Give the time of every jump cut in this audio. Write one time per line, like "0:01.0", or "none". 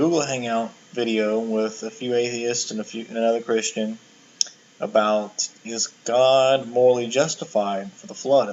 0:07.0